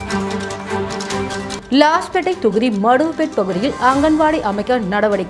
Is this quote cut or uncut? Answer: uncut